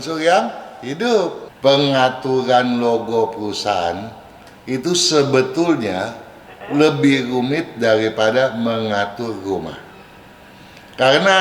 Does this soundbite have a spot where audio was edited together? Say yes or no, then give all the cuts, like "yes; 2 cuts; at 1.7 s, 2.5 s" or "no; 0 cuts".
yes; 1 cut; at 1.4 s